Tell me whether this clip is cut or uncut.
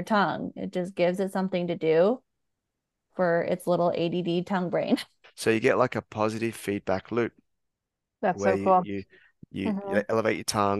cut